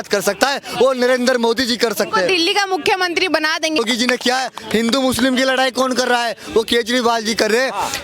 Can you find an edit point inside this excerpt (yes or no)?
yes